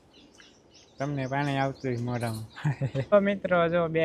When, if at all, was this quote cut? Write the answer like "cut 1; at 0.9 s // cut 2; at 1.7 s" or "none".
cut 1; at 3.1 s